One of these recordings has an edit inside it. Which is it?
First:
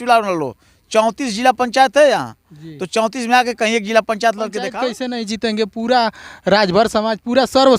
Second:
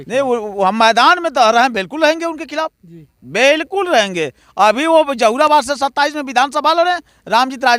first; 1 cut; at 4.8 s

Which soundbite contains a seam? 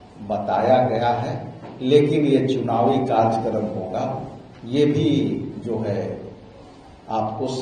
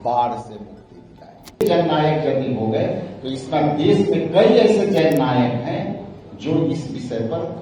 second; 1 cut; at 1.6 s

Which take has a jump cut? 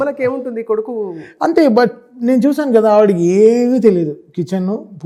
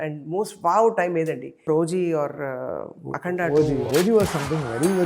second; 2 cuts; at 1.7 s, 3.9 s

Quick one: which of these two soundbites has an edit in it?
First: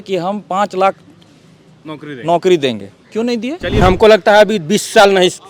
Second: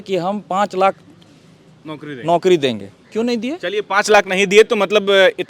first; 1 cut; at 3.8 s

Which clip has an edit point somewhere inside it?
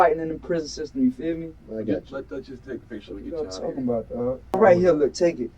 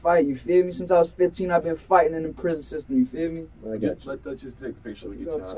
first; 1 cut; at 4.6 s

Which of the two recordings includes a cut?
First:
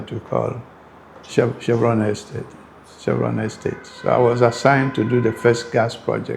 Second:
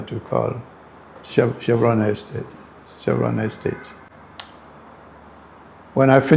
first; 1 cut; at 3.9 s

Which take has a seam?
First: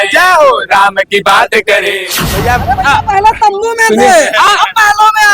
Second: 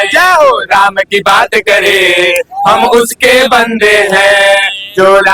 first; 1 cut; at 2.0 s

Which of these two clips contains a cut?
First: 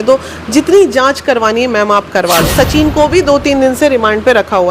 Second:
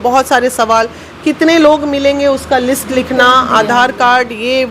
first; 1 cut; at 2.9 s

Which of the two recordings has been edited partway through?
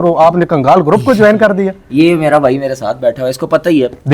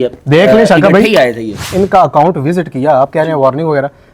second; 1 cut; at 1.7 s

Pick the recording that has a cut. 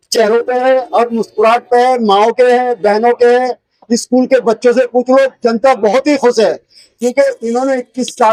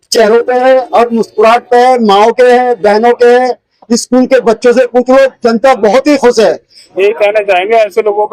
second; 1 cut; at 6.8 s

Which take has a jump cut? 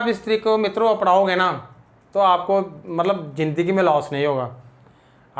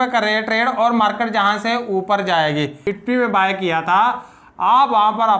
second; 1 cut; at 2.8 s

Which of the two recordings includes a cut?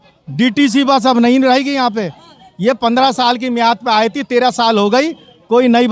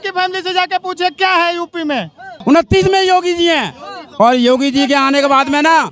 second; 1 cut; at 2.3 s

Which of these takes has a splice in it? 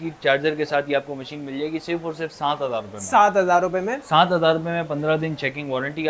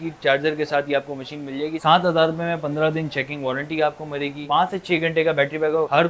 second; 2 cuts; at 1.8 s, 4.4 s

